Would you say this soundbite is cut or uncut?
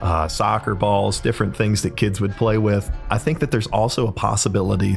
cut